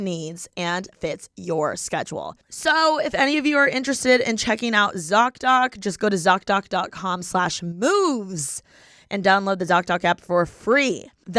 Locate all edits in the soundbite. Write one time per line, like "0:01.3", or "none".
0:02.4